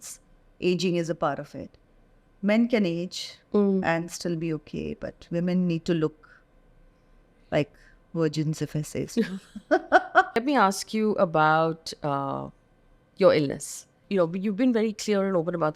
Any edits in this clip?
yes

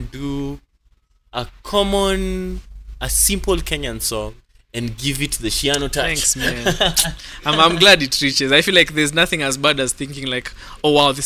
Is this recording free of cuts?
yes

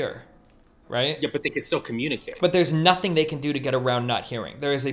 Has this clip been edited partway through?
no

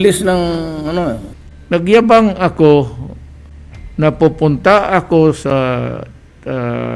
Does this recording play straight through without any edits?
no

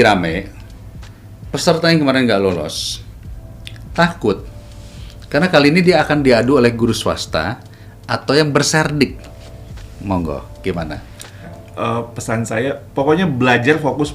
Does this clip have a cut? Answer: yes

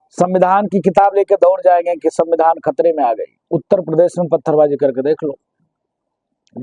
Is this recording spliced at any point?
yes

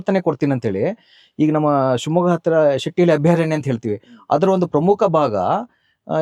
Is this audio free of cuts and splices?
yes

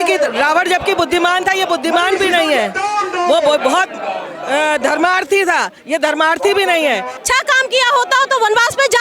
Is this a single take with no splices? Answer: no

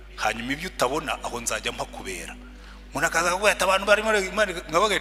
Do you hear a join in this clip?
no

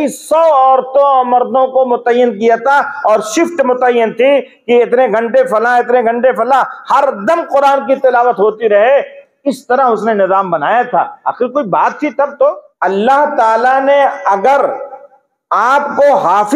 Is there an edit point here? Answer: yes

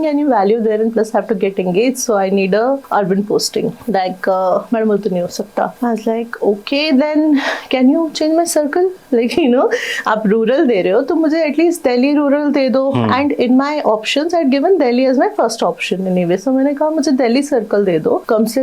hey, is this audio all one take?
yes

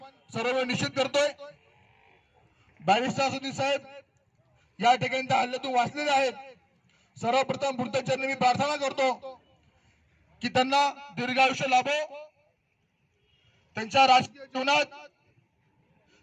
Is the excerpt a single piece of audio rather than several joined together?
yes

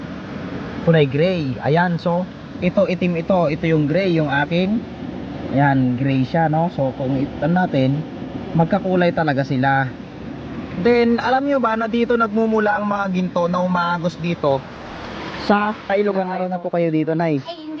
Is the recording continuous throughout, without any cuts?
no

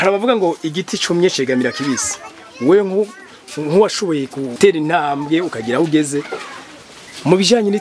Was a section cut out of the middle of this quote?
yes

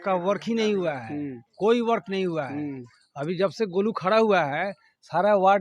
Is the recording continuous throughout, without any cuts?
yes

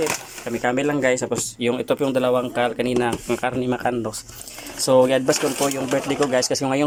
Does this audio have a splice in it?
no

